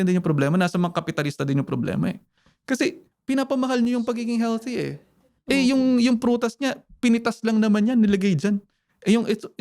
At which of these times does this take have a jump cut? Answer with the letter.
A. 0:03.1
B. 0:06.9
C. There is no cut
A